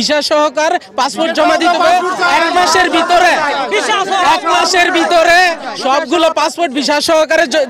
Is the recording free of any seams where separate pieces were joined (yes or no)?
yes